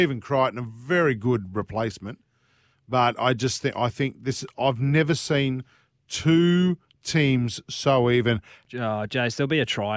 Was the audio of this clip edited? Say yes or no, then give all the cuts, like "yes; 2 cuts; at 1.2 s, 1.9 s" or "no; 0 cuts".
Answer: yes; 1 cut; at 8.6 s